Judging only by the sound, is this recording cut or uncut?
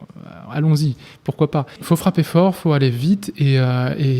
cut